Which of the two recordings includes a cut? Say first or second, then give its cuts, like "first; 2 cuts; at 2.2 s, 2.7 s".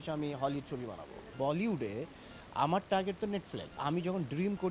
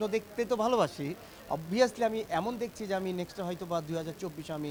first; 2 cuts; at 1.3 s, 3.8 s